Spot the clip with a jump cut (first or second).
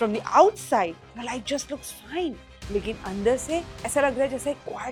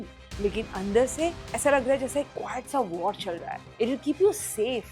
second